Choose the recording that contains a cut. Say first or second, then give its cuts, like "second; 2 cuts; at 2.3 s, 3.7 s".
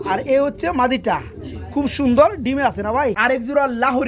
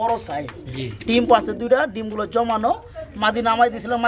first; 1 cut; at 3.2 s